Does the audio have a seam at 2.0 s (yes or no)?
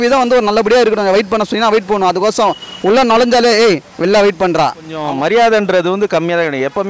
no